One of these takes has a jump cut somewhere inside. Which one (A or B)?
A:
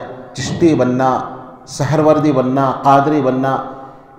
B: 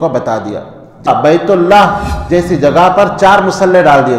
B